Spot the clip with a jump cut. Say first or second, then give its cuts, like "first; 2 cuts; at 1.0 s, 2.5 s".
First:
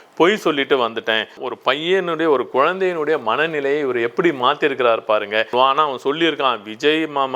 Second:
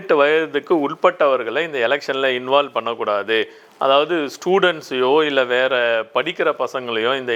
first; 2 cuts; at 1.4 s, 5.5 s